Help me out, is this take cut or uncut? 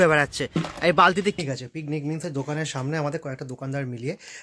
cut